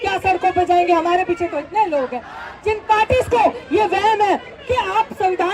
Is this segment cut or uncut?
uncut